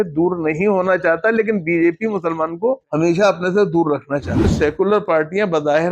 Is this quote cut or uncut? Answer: cut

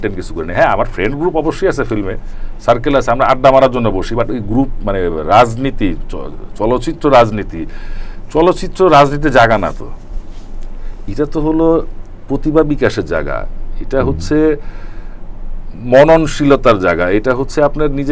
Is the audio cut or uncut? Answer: uncut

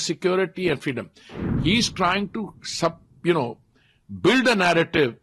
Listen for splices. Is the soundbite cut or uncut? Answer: cut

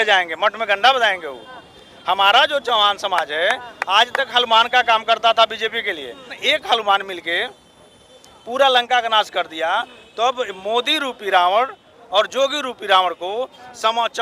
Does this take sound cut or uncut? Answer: cut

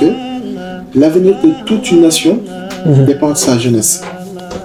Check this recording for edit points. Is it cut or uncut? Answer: uncut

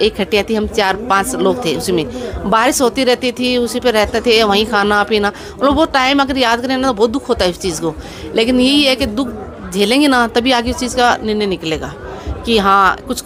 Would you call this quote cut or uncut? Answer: uncut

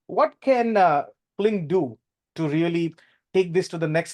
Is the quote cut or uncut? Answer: cut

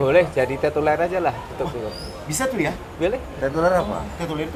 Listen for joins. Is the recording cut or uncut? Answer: uncut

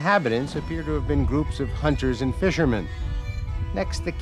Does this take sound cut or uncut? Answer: uncut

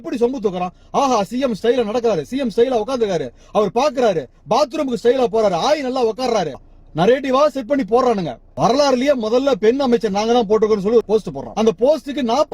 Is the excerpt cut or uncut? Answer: cut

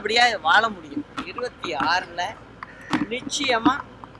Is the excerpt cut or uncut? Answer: cut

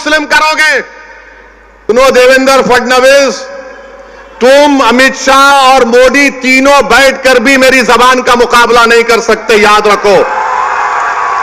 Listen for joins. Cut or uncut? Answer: cut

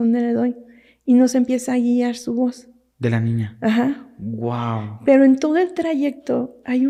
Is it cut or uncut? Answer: uncut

